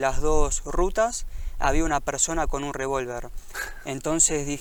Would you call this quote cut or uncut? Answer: uncut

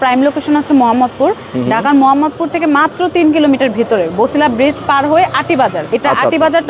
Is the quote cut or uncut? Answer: cut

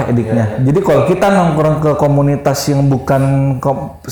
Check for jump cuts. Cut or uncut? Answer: uncut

